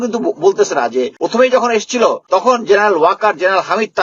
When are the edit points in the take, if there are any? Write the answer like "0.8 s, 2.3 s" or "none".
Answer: 1.2 s, 2.2 s